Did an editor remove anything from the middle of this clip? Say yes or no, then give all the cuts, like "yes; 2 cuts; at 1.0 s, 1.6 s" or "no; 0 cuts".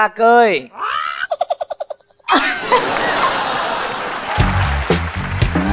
yes; 1 cut; at 4.2 s